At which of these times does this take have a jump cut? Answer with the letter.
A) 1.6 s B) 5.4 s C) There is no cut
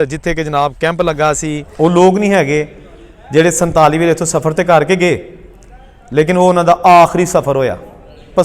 A